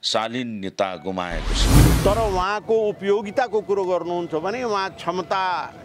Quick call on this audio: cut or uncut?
cut